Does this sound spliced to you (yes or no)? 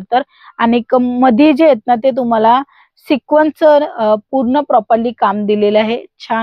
no